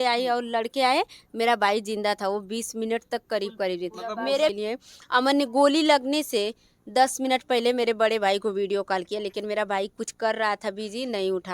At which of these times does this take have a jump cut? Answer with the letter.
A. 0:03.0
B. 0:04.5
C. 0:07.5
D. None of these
B